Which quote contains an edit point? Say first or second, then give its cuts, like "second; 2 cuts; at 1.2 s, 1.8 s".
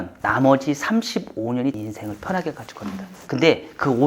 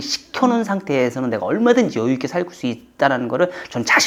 first; 2 cuts; at 1.8 s, 3.1 s